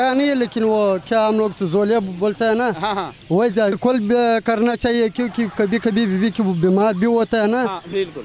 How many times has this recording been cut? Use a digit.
1